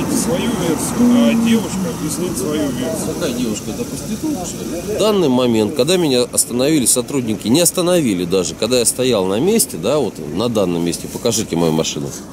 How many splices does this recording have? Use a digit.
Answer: 2